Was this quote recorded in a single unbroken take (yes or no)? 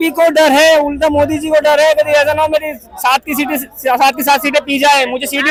yes